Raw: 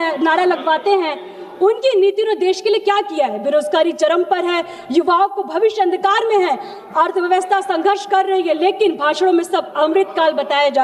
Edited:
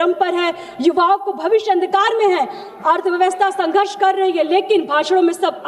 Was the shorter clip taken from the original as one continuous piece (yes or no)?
yes